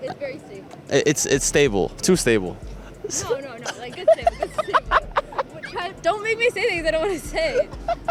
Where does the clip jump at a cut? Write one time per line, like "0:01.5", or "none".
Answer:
none